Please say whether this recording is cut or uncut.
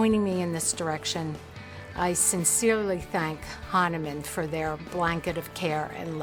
uncut